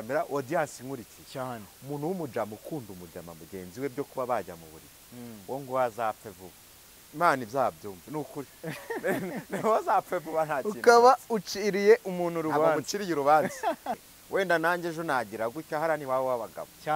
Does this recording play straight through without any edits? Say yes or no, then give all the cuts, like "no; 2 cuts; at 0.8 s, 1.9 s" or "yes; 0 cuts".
no; 1 cut; at 14.0 s